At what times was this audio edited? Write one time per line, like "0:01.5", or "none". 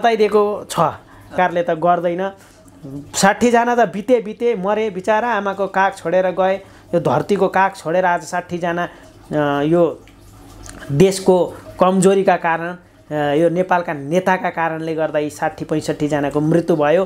0:01.3